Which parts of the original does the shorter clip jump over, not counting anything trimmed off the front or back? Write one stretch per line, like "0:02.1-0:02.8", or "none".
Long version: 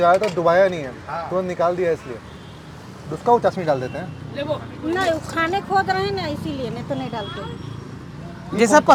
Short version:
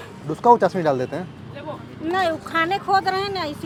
none